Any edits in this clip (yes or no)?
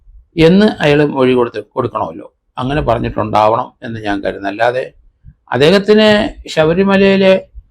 no